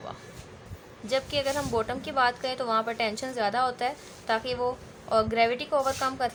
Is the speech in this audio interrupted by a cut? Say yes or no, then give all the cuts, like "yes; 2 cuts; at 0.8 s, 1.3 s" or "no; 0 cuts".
no; 0 cuts